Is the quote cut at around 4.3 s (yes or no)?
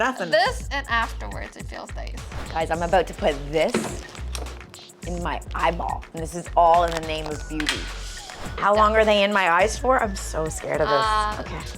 no